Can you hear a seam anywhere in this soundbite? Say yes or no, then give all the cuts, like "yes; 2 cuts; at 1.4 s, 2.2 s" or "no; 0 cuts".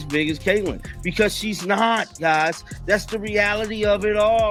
no; 0 cuts